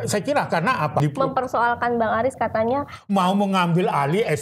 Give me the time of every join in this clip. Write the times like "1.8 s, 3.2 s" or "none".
1.0 s